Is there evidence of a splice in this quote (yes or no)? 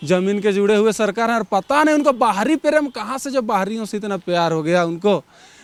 no